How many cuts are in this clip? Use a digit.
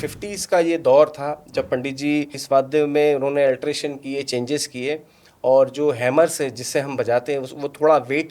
1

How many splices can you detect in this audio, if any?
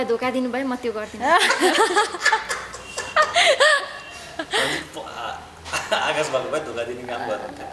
0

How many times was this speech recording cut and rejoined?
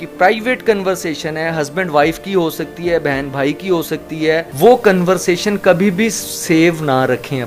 1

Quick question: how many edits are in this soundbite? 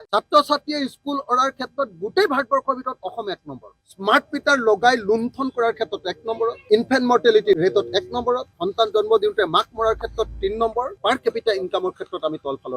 4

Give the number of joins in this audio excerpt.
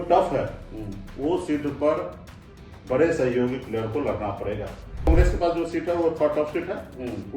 1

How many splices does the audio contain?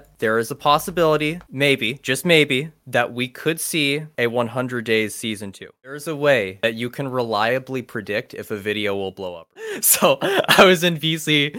2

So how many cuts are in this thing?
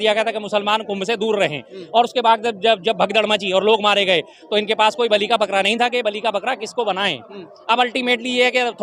0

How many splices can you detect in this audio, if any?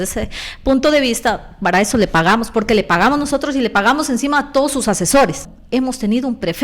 1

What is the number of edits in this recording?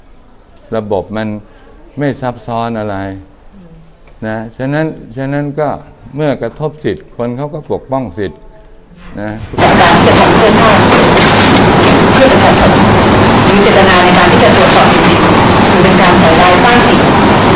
1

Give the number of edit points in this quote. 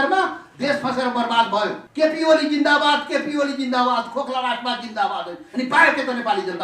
1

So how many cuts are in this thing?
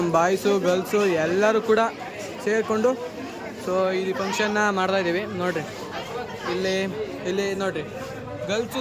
0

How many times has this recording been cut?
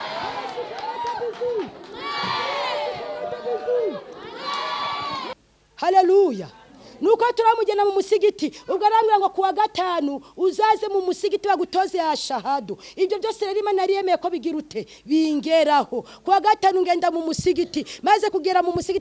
1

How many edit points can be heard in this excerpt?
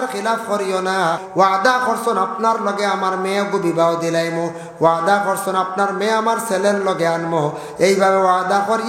1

